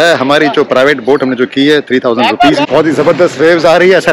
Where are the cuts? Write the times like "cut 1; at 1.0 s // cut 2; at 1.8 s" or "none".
cut 1; at 2.7 s